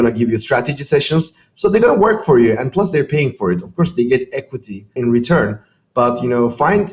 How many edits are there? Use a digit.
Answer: 1